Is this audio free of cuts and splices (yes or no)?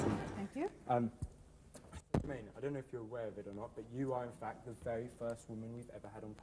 yes